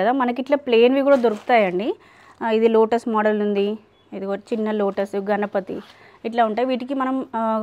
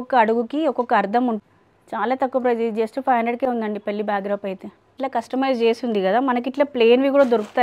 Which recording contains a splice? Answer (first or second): second